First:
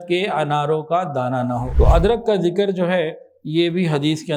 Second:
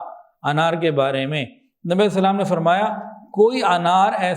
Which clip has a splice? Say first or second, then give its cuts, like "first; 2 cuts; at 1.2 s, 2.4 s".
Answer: first; 1 cut; at 1.7 s